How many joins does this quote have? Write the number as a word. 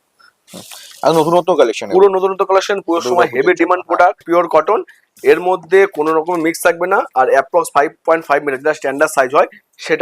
one